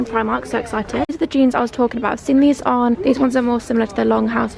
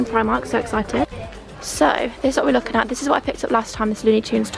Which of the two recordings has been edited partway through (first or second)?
first